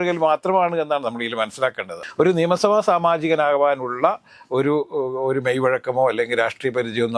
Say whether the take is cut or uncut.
cut